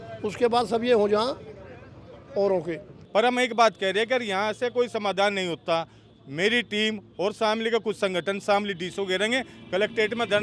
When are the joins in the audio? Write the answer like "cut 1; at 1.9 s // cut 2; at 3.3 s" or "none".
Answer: cut 1; at 2.9 s